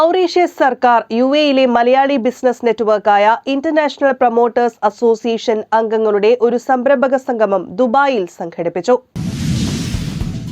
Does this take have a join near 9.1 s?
yes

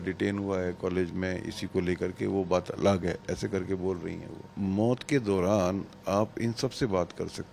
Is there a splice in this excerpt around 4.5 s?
yes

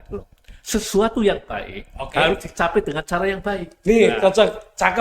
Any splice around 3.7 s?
no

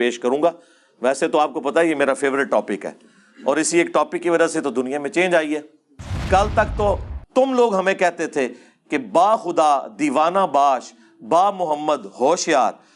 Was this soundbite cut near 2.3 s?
no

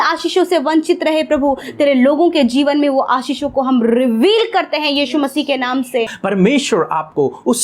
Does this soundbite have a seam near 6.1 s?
yes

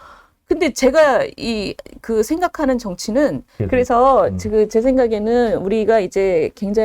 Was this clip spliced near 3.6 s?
yes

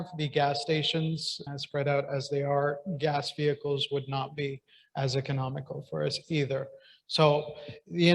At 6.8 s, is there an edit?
no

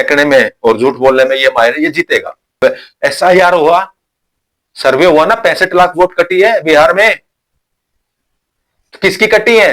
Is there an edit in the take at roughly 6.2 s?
no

